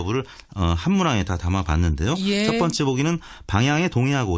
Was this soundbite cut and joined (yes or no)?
yes